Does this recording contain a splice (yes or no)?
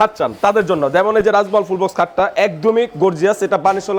no